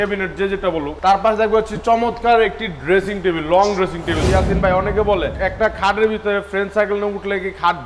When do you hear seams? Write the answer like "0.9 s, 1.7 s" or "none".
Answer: 4.2 s